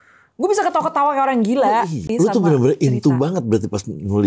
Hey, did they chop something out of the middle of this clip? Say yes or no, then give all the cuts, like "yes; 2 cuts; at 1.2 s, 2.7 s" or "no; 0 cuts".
yes; 1 cut; at 2.1 s